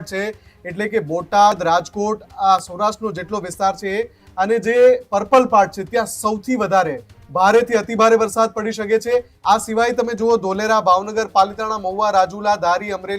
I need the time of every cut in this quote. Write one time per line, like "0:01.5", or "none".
0:09.3